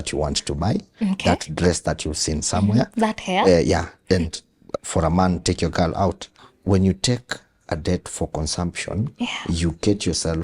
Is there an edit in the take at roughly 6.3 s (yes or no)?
yes